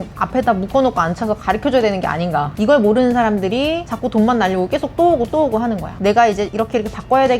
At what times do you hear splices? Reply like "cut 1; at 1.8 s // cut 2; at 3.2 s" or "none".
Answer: cut 1; at 2.5 s // cut 2; at 3.9 s // cut 3; at 5.9 s